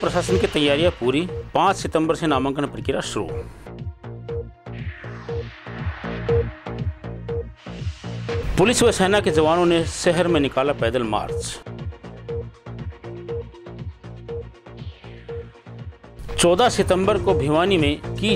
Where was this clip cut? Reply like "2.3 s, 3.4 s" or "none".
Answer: none